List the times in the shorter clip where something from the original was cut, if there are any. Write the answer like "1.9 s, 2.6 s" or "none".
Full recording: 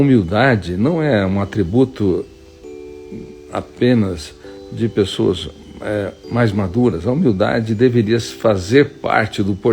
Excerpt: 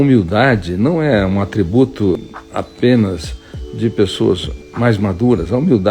2.2 s, 4.6 s